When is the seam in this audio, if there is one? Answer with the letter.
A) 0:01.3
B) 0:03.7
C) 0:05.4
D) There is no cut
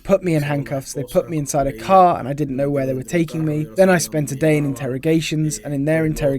B